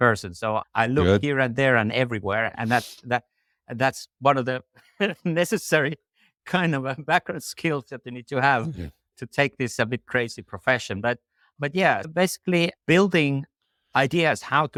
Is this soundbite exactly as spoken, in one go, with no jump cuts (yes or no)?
yes